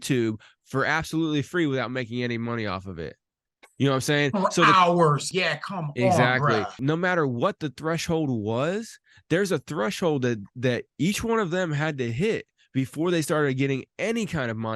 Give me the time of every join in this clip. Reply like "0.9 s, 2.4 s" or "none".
5.3 s, 6.8 s